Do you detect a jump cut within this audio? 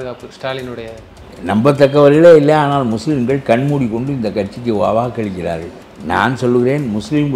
yes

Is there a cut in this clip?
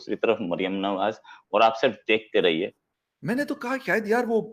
yes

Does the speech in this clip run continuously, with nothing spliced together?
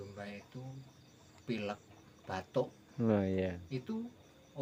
yes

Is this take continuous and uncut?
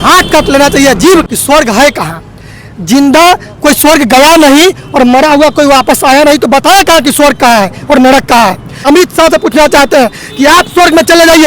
no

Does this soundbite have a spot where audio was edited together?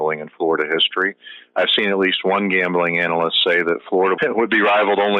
yes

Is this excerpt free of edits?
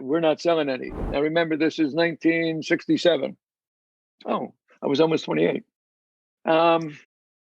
no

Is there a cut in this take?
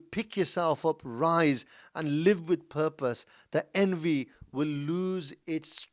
no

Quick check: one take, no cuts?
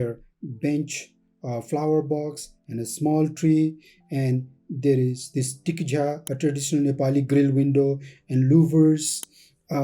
yes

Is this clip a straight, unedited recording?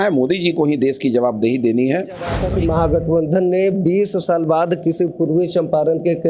no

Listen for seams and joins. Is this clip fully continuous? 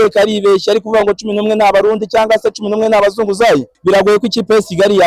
no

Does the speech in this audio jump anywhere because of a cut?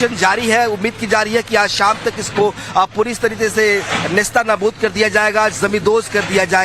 no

